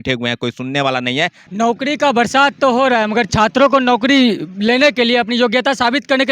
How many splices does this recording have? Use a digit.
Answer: 1